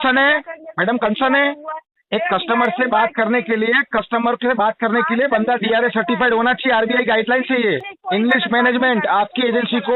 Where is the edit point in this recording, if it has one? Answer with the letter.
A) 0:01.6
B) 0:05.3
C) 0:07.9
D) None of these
C